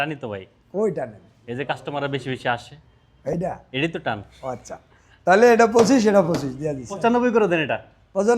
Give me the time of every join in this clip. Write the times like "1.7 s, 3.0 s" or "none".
7.0 s